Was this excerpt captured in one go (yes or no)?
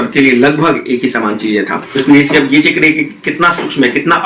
no